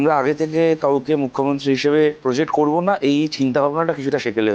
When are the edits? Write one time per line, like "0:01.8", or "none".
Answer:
0:02.2